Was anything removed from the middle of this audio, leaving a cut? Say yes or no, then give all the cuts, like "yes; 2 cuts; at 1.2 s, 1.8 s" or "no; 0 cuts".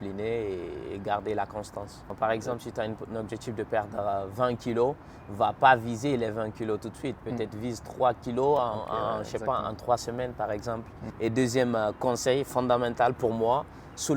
yes; 2 cuts; at 2.1 s, 11.0 s